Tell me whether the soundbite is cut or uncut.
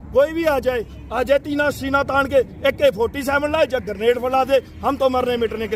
uncut